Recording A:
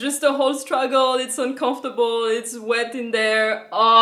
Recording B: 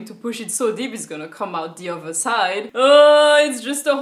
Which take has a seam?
B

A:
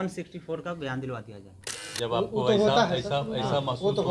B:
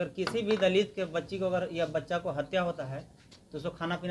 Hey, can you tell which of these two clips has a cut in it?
A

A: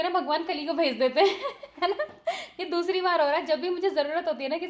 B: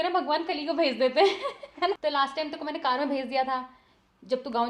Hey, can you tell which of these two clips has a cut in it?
B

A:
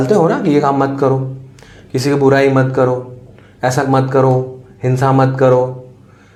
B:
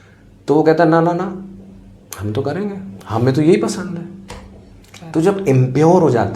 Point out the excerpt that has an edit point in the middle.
B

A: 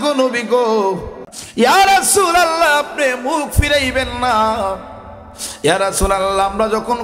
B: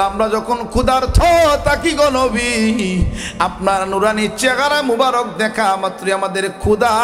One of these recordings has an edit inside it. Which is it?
A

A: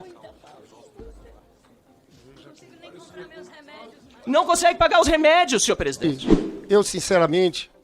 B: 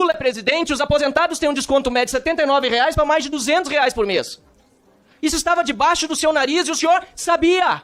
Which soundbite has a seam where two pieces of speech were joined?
A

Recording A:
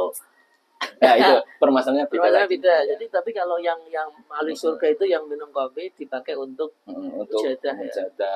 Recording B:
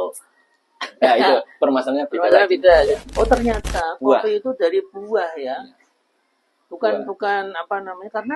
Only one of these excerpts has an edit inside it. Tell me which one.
B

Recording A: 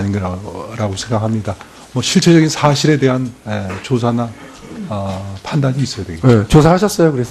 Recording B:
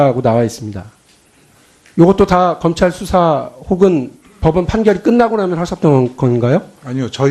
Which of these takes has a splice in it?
B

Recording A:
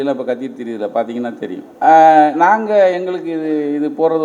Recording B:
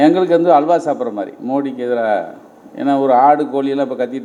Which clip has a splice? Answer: A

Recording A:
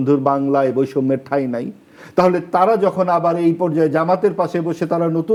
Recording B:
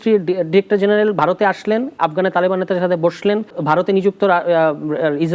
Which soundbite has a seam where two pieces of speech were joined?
B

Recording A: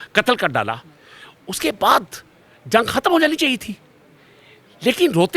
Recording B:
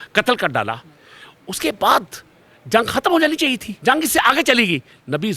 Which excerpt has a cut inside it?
B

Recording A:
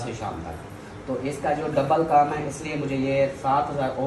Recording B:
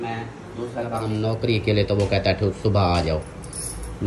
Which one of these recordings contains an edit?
B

